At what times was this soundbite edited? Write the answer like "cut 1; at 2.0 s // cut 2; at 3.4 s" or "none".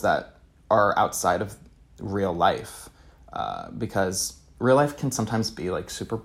none